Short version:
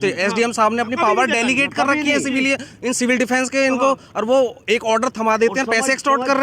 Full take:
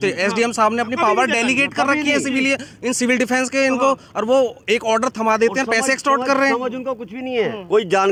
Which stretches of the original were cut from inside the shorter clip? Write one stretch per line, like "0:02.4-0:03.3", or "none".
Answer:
none